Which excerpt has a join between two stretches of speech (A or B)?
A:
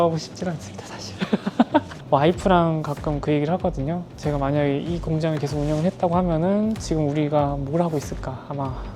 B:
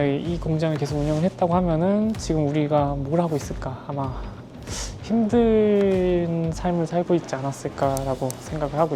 A